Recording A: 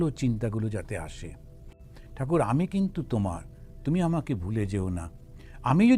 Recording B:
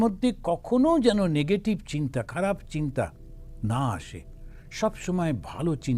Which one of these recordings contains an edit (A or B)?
A